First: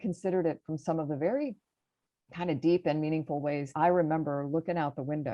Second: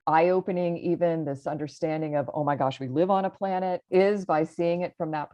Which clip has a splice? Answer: first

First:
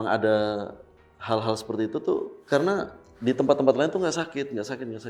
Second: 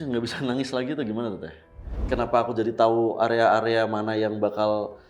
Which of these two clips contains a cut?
second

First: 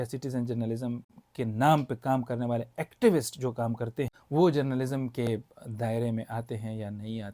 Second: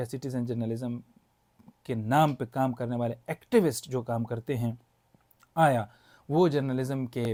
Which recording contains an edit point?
first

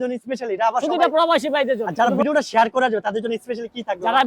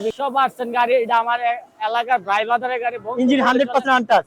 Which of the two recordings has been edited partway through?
first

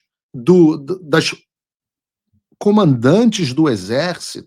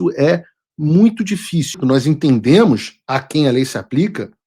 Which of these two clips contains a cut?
second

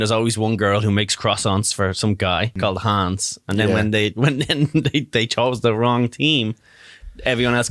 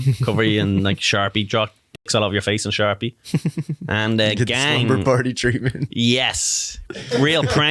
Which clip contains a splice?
first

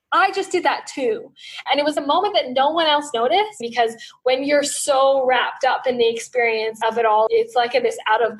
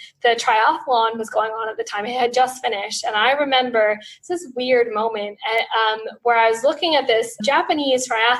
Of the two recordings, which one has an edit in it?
first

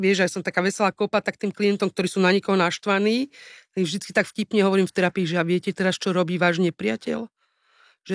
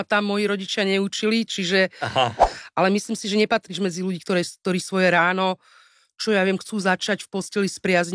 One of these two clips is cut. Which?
second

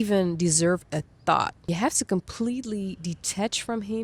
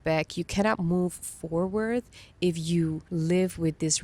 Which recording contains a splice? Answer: second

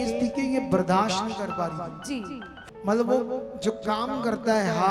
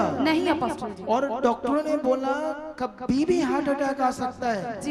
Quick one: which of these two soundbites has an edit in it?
first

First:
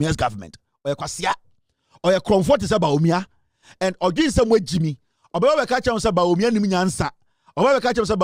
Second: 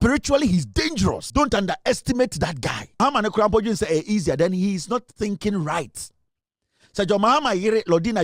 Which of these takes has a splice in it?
second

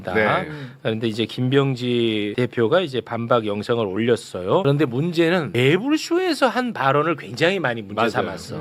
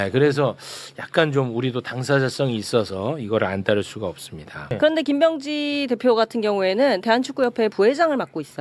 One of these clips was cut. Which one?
second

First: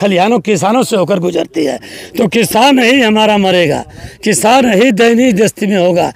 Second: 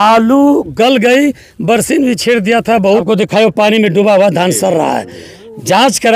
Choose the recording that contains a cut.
second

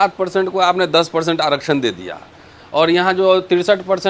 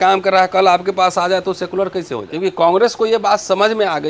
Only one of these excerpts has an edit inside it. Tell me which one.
second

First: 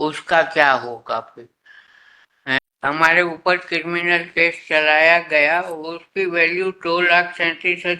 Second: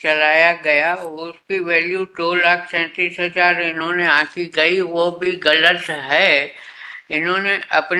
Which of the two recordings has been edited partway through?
first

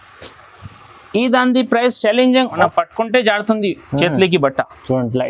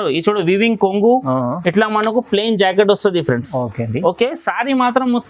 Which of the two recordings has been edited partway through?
first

